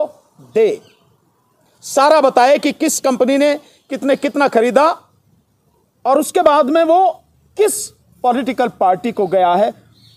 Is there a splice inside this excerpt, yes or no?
no